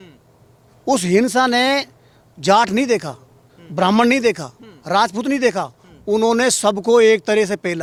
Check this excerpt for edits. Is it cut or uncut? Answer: uncut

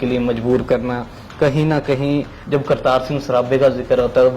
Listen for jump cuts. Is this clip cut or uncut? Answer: cut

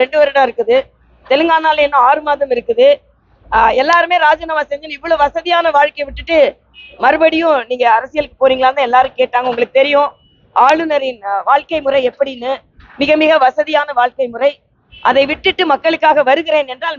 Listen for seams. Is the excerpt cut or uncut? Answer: uncut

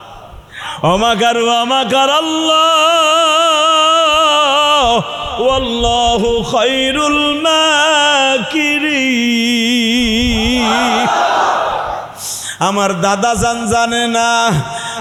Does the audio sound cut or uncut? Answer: uncut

